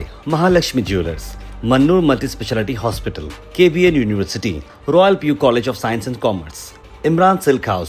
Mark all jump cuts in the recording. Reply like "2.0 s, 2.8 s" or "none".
none